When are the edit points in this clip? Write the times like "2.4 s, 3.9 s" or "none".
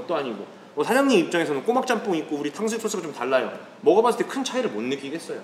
none